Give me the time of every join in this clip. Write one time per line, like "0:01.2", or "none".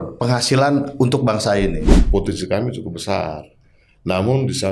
0:01.9